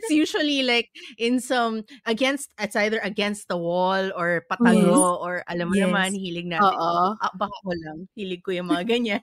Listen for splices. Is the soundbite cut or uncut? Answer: uncut